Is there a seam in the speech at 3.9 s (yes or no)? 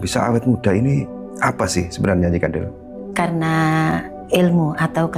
yes